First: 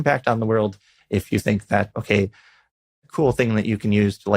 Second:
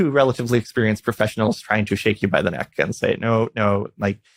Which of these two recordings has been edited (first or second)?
first